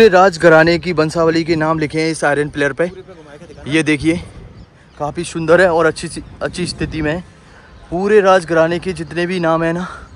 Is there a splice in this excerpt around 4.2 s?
no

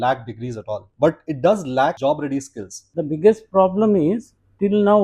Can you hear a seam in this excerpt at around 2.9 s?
yes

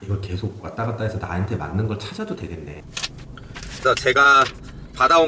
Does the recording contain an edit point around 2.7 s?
yes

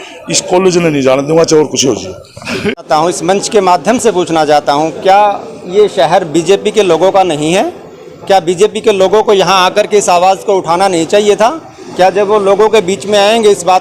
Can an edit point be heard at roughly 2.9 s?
yes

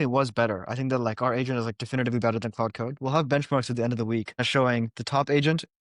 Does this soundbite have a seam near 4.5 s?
yes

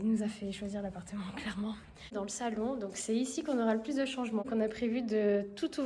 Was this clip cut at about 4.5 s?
yes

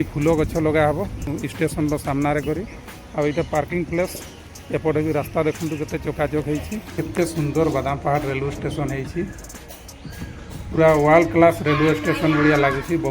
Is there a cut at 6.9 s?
yes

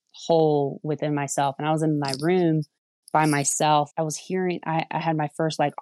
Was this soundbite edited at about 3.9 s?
yes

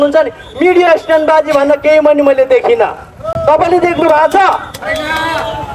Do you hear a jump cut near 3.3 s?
no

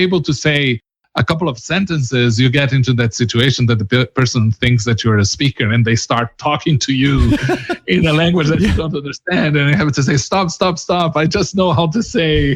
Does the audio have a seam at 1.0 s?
yes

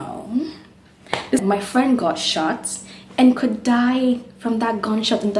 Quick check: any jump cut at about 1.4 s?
yes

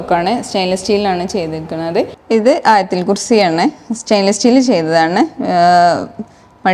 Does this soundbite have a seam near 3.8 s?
no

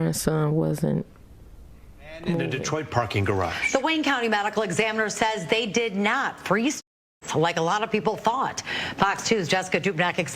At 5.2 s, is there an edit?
no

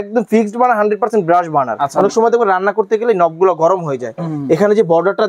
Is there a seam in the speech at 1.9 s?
yes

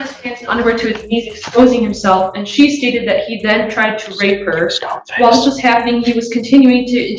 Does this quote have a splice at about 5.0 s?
no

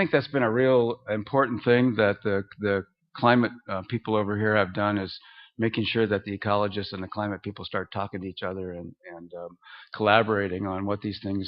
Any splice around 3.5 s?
no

